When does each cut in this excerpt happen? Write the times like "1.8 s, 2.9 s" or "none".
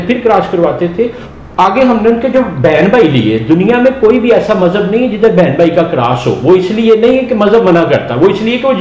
1.2 s

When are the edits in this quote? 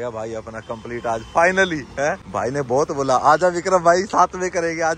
none

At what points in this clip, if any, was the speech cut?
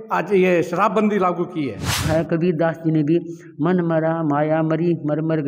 2.1 s

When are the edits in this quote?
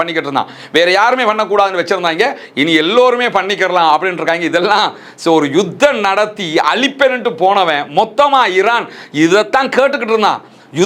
none

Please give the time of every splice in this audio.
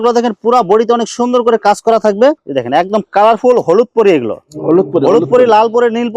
2.4 s

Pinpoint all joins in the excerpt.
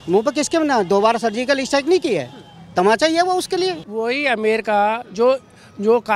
3.8 s

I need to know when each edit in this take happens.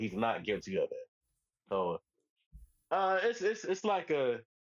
none

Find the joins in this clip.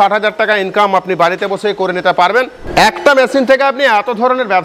2.6 s

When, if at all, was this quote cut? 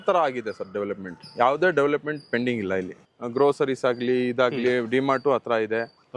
none

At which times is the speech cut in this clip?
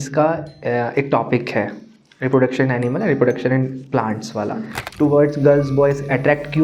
4.8 s

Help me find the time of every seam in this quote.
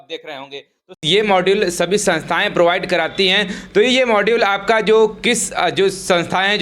1.0 s

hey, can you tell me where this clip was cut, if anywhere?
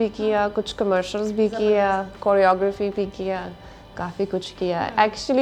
none

